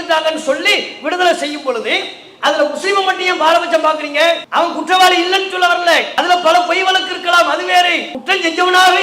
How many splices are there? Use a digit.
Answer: 3